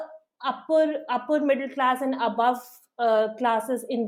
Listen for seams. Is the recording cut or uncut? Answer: uncut